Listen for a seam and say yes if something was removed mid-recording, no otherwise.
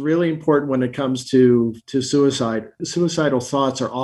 no